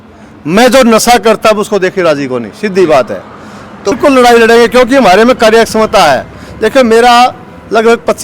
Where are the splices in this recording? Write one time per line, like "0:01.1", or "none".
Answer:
0:04.0